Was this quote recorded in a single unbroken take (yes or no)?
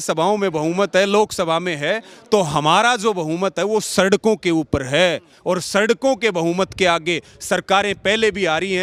yes